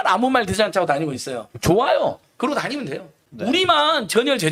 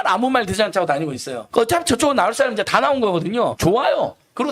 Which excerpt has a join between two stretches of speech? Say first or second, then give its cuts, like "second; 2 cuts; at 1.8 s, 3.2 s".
second; 2 cuts; at 1.4 s, 3.6 s